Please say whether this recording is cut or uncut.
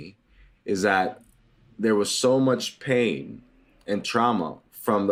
uncut